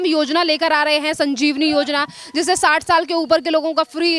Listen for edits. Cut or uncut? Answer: uncut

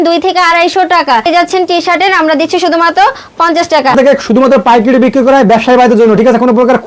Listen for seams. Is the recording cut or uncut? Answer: cut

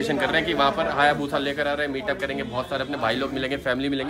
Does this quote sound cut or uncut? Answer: uncut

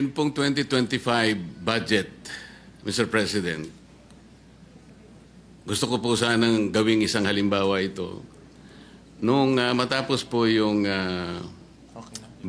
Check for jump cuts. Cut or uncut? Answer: uncut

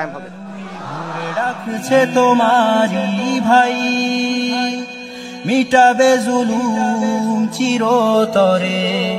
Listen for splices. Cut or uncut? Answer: cut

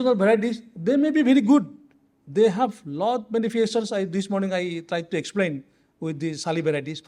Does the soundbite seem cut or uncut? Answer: uncut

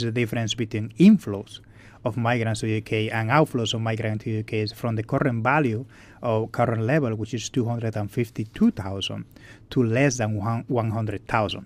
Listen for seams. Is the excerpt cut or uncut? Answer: cut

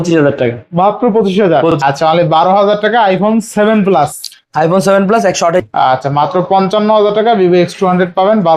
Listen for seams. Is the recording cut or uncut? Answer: cut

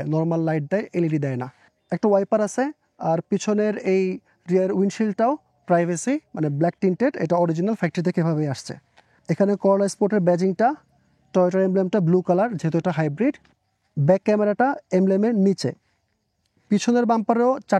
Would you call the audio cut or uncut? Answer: uncut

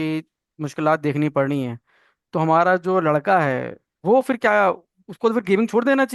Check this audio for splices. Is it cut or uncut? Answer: uncut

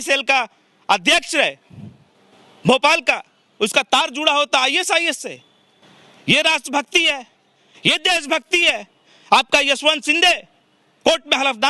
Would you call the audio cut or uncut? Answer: uncut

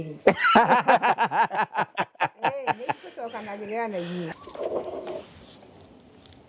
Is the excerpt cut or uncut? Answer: cut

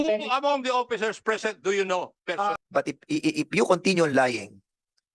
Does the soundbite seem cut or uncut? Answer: cut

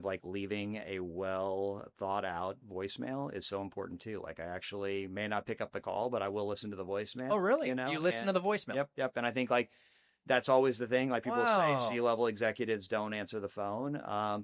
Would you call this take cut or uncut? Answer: uncut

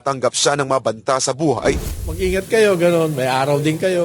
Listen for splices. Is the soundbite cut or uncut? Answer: cut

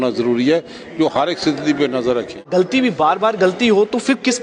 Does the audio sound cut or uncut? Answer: cut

